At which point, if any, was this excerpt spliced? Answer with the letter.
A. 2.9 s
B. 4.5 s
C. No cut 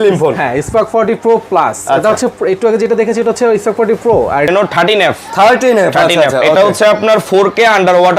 B